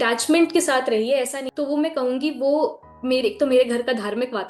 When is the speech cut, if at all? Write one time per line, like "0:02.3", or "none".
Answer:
0:01.4